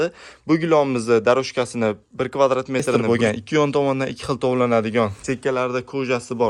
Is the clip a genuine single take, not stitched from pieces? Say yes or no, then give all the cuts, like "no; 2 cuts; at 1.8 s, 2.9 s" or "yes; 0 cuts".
no; 1 cut; at 3.0 s